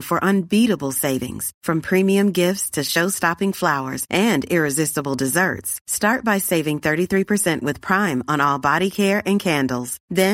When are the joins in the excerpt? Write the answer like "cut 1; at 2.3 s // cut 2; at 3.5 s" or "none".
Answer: none